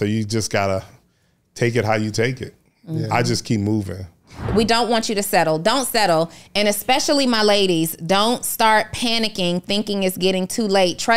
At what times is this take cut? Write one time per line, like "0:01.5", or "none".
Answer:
0:04.5